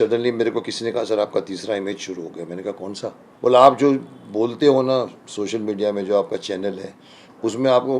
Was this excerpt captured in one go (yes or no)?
no